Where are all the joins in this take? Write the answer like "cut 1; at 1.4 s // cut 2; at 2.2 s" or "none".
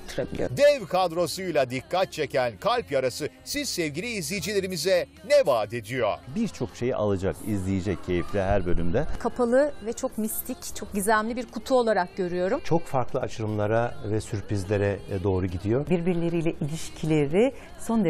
none